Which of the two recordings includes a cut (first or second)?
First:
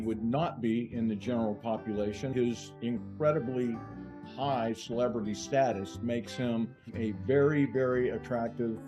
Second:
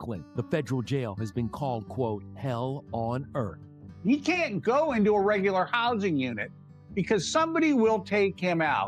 second